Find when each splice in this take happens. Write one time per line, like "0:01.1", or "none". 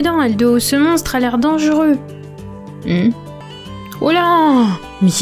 none